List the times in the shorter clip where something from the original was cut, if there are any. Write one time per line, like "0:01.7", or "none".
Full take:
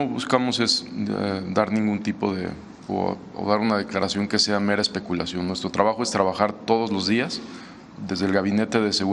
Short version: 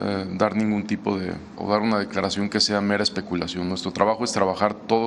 0:01.5